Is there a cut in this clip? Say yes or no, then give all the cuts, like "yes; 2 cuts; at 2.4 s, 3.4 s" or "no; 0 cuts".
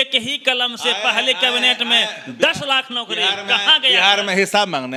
no; 0 cuts